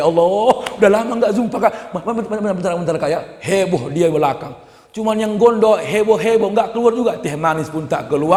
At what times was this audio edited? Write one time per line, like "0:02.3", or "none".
none